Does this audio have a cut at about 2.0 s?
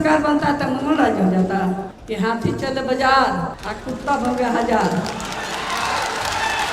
yes; 2 cuts; at 2.0 s, 3.6 s

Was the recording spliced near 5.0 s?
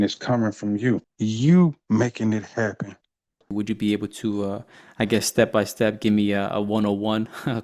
no; 2 cuts; at 1.0 s, 3.4 s

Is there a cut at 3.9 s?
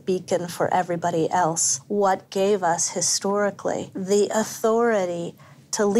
yes; 2 cuts; at 2.3 s, 3.9 s

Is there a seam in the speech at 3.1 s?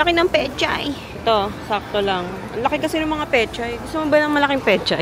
no; 1 cut; at 1.1 s

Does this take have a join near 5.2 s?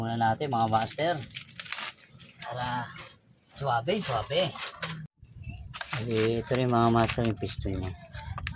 yes; 1 cut; at 5.2 s

